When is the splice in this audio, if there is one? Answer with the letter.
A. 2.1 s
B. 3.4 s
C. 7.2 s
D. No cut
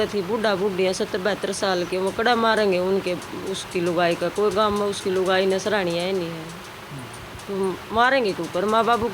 D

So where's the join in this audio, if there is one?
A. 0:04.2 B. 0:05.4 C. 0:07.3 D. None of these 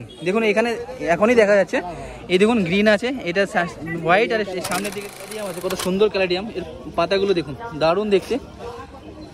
B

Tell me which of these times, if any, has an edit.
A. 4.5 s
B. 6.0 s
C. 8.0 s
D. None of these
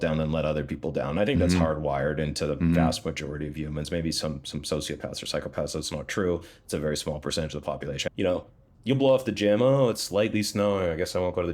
C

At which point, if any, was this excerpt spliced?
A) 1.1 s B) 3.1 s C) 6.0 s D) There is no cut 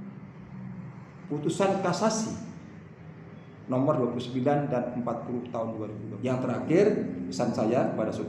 C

